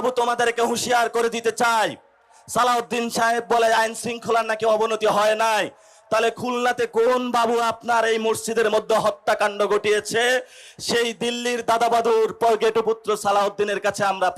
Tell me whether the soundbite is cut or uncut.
uncut